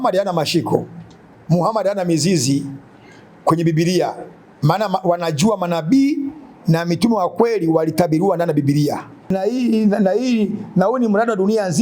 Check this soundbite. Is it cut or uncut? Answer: cut